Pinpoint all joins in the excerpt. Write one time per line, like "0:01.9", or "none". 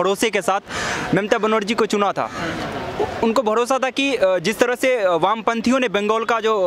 none